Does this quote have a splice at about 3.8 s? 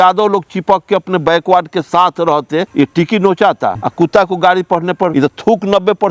yes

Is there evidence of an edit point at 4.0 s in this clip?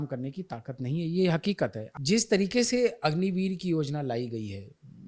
no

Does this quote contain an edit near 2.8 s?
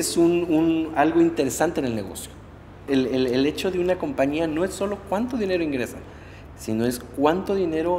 yes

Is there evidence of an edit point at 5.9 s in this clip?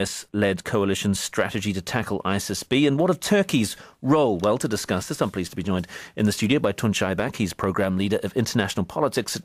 no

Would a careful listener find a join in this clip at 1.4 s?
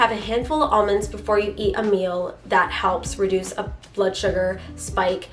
no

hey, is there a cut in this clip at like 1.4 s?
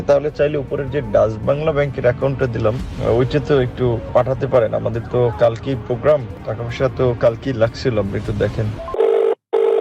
no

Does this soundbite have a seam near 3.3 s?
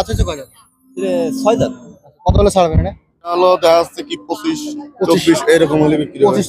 yes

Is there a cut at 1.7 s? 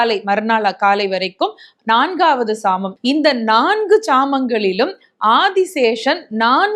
no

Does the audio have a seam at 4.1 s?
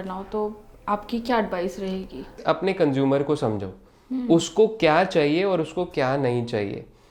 no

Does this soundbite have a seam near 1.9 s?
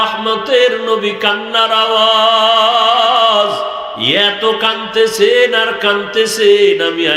no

